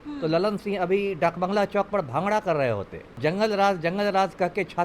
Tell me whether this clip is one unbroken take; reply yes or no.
no